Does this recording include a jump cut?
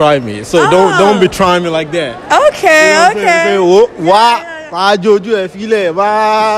no; 0 cuts

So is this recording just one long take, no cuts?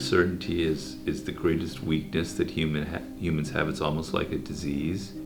yes; 0 cuts

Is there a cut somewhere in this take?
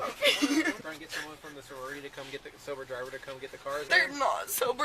yes; 2 cuts; at 0.8 s, 3.8 s

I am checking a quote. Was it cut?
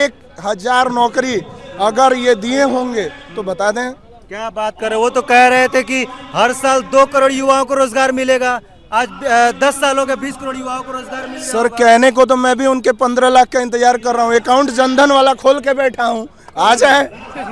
no; 0 cuts

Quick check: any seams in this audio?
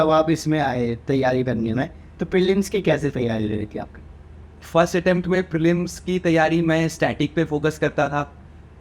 no; 0 cuts

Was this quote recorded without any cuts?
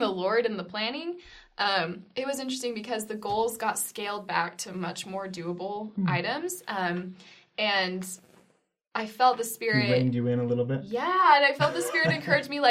yes; 0 cuts

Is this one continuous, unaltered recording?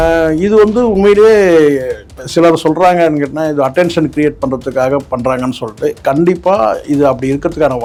yes; 0 cuts

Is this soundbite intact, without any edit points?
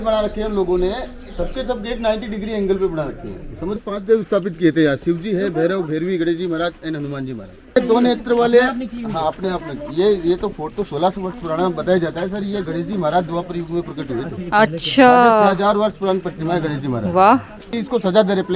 no; 3 cuts; at 3.8 s, 7.7 s, 17.7 s

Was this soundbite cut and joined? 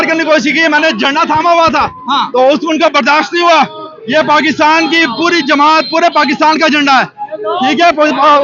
no; 0 cuts

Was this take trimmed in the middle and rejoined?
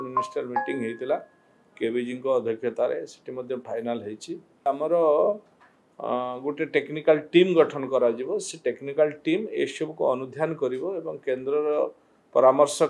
yes; 1 cut; at 4.7 s

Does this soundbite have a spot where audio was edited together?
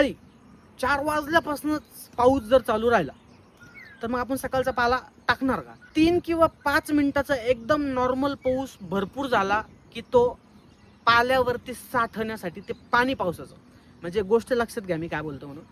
no; 0 cuts

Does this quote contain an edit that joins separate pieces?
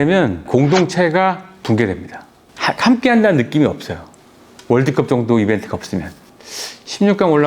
yes; 1 cut; at 2.3 s

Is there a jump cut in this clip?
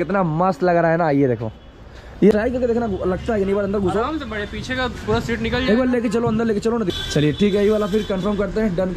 yes; 2 cuts; at 2.3 s, 6.9 s

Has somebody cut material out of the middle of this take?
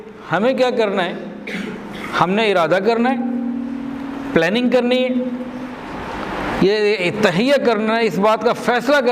no; 0 cuts

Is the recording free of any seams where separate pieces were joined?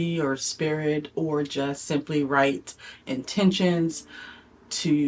yes; 0 cuts

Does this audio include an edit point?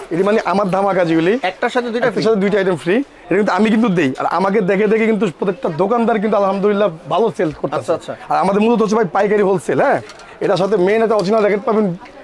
no; 0 cuts

